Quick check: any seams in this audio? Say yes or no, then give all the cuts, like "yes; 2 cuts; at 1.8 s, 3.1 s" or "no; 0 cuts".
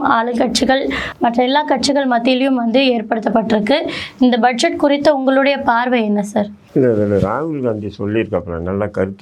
no; 0 cuts